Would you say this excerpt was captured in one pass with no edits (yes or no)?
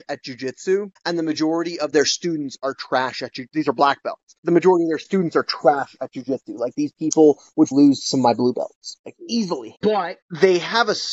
no